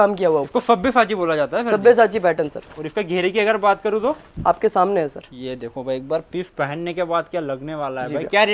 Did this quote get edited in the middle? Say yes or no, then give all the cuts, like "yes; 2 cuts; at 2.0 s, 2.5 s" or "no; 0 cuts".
no; 0 cuts